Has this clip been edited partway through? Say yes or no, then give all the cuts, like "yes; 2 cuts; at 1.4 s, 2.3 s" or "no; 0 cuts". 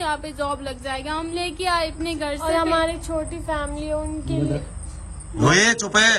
no; 0 cuts